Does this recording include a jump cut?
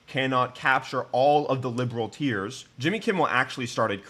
yes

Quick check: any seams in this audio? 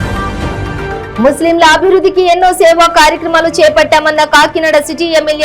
no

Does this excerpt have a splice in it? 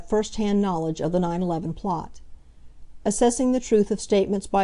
yes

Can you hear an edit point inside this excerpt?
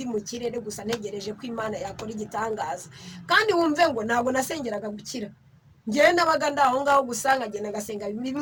no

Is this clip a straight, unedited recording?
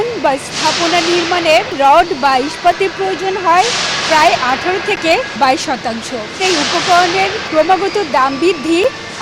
no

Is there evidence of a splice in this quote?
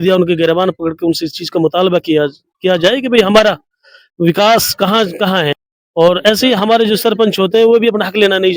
yes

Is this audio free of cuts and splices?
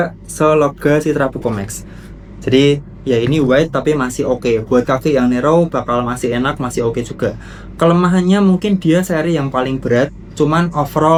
yes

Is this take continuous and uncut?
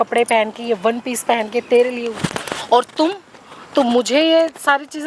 yes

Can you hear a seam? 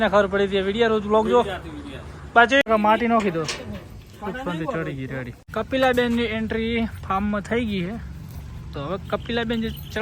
yes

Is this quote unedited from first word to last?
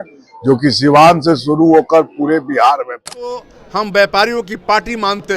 no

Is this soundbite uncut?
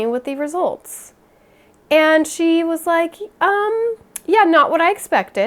yes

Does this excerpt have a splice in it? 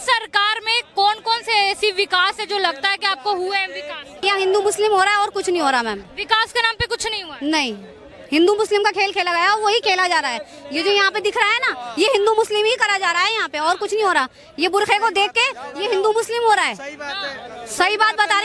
yes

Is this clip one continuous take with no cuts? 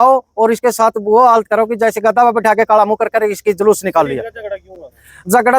yes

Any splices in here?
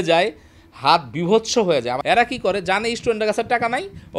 yes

